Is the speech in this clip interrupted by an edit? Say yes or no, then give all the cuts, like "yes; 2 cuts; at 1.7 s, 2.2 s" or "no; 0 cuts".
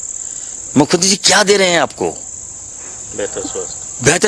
no; 0 cuts